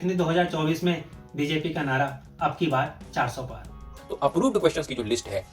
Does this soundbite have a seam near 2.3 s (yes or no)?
no